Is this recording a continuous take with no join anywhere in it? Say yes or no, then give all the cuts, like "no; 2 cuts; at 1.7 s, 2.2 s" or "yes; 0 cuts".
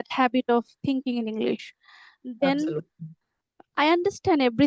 yes; 0 cuts